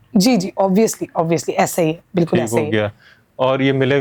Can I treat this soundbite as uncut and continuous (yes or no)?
yes